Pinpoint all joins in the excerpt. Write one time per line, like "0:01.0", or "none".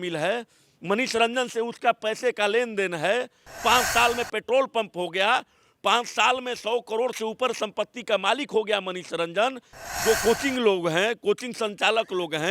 0:03.4
0:09.7